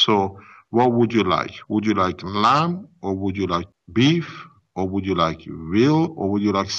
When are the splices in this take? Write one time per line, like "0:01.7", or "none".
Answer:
0:03.8